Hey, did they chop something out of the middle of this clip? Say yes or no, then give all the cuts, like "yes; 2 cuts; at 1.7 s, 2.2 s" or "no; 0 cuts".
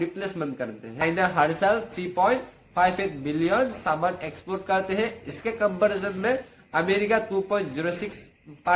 yes; 1 cut; at 1.0 s